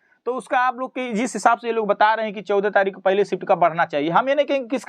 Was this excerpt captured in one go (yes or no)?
yes